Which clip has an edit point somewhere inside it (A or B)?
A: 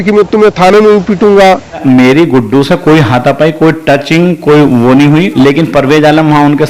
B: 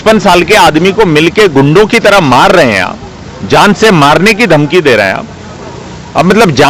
A